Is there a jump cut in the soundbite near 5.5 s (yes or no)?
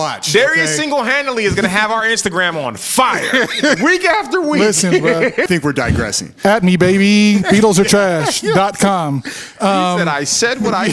yes